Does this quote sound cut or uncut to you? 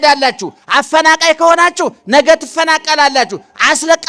uncut